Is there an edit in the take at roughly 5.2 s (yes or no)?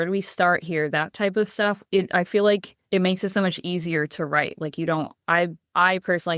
no